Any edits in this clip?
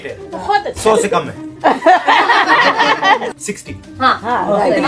yes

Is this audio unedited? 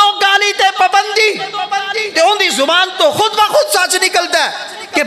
yes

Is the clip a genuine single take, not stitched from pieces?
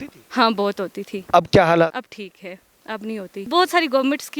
no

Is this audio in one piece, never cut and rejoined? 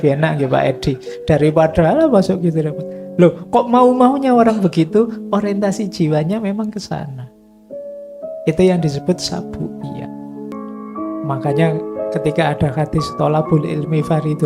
no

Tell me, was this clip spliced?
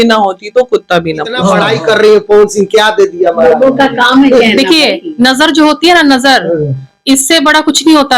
yes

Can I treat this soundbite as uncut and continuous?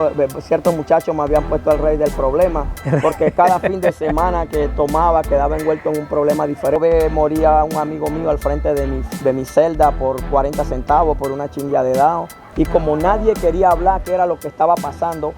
no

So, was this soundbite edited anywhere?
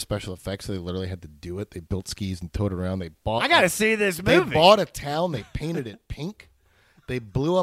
no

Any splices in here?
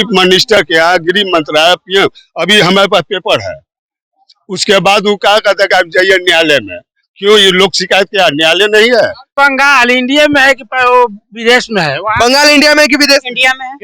yes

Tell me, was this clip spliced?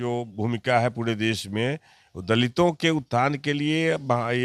no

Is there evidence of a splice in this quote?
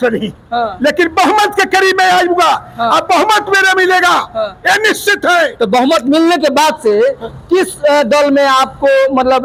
no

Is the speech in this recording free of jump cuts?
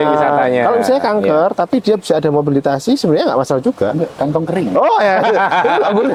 yes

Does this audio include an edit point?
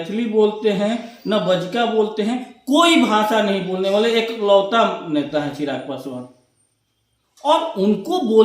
no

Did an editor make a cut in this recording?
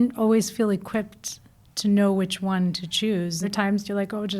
yes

